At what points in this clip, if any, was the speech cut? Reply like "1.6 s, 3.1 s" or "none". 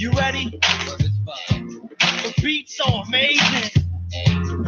none